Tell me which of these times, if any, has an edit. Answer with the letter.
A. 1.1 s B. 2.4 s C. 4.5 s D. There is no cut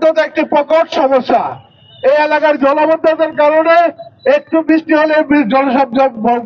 D